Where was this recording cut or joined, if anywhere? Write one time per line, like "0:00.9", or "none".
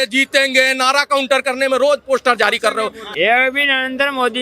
0:03.0